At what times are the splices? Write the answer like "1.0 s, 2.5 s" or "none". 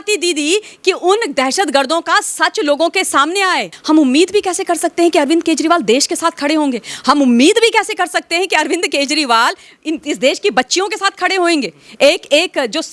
3.7 s